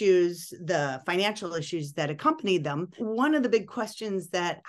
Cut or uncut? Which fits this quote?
cut